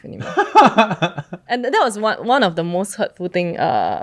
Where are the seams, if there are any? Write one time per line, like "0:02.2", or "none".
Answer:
0:01.4